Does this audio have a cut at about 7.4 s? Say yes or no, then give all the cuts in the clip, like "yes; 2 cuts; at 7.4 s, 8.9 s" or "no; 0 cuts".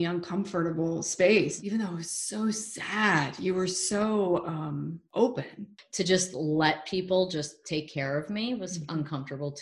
no; 3 cuts; at 1.5 s, 5.0 s, 5.8 s